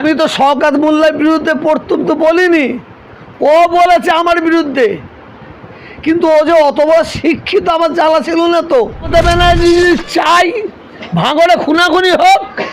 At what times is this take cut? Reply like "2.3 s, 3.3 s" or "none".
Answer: 9.1 s